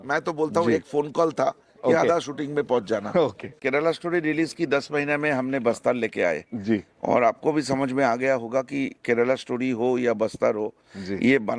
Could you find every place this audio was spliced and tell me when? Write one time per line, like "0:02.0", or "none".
0:03.5